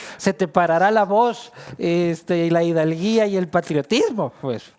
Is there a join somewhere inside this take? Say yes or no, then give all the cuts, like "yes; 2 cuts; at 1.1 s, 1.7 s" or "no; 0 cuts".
no; 0 cuts